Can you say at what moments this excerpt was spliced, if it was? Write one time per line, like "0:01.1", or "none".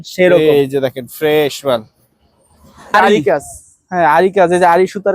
0:02.9

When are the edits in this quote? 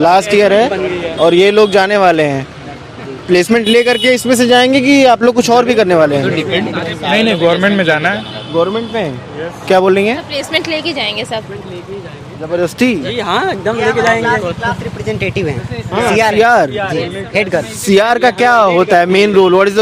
none

